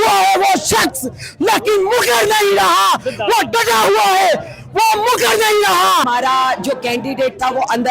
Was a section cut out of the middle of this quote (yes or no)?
yes